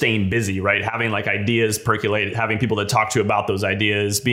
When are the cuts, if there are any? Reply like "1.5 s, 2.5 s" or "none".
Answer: none